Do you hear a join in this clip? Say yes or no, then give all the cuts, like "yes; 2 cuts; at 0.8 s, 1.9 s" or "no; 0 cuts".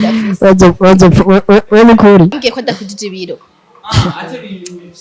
yes; 1 cut; at 2.3 s